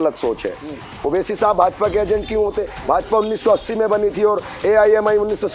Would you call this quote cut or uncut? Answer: uncut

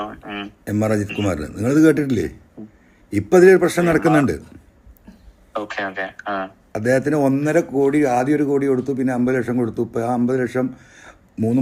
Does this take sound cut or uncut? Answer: uncut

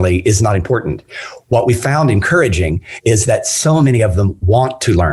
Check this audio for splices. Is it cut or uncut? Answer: uncut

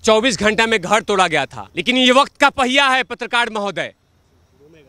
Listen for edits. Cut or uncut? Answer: cut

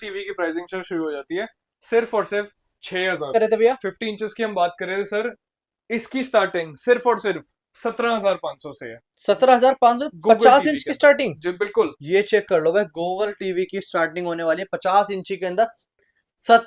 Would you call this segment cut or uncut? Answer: cut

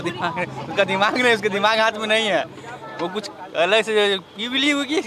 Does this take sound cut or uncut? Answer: uncut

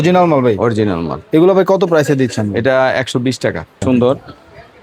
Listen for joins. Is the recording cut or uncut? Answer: cut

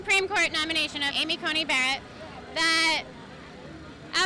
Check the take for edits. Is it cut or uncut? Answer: uncut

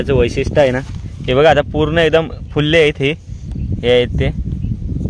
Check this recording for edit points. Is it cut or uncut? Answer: uncut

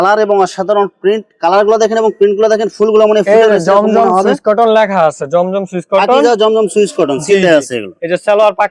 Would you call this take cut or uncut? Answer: uncut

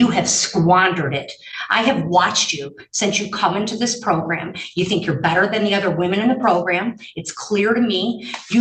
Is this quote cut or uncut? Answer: uncut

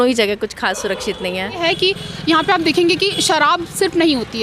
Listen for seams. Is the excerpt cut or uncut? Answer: cut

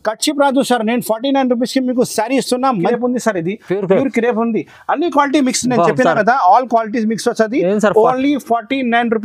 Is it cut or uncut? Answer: cut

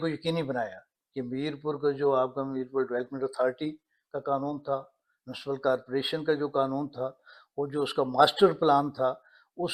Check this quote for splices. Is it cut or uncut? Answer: uncut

